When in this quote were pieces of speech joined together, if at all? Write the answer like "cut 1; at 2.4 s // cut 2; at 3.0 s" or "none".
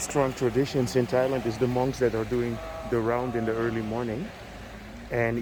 none